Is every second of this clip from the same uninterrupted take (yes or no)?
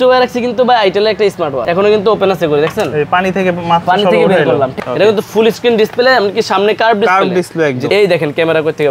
no